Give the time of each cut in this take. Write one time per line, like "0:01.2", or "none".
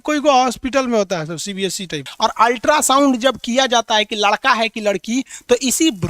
0:02.1